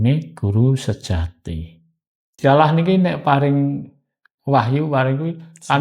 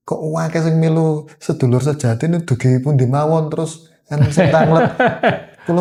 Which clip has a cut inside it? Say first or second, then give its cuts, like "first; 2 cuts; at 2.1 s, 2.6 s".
first; 1 cut; at 2.4 s